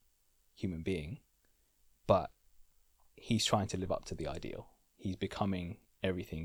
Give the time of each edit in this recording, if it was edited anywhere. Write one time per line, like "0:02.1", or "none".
none